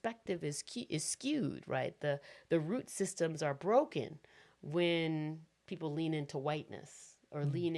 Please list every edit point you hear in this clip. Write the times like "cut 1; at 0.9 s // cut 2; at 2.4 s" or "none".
none

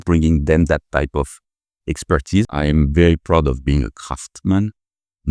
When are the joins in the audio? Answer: cut 1; at 2.5 s

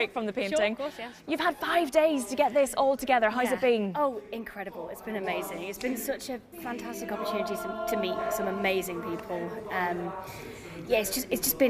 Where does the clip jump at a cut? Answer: cut 1; at 4.1 s

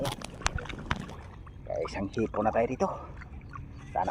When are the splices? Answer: cut 1; at 1.2 s

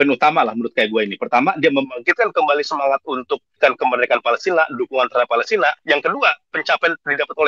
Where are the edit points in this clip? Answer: cut 1; at 3.6 s

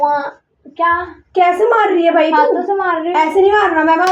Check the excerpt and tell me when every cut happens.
none

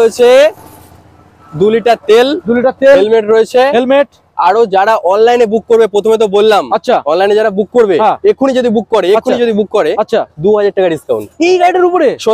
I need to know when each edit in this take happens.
none

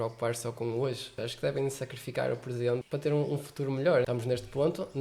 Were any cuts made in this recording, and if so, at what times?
cut 1; at 1.1 s // cut 2; at 2.8 s // cut 3; at 4.0 s

